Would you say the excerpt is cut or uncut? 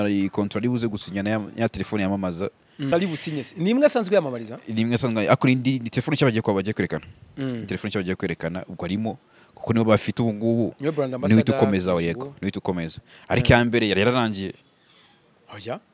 cut